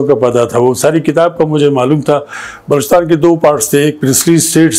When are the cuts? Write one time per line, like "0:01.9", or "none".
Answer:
0:02.4